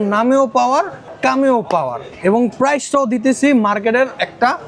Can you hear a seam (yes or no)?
yes